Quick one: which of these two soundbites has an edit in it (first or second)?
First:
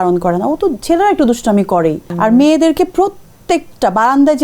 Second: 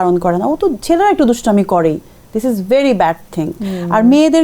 first